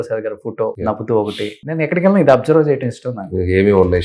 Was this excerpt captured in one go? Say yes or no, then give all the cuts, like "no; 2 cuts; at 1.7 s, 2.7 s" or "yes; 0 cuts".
no; 2 cuts; at 0.8 s, 1.6 s